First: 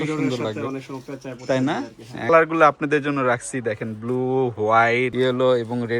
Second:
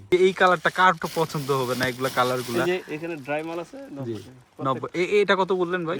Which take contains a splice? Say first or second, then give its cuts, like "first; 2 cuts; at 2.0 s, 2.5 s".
first; 1 cut; at 2.3 s